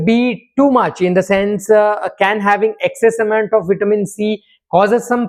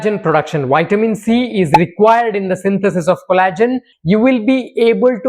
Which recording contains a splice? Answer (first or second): second